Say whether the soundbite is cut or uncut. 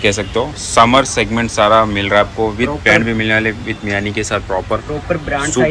uncut